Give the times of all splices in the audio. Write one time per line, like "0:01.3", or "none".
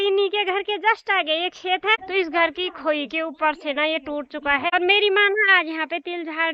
0:02.0
0:04.7